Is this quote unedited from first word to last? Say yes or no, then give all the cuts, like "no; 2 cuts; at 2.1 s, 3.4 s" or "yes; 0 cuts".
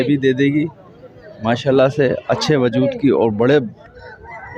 yes; 0 cuts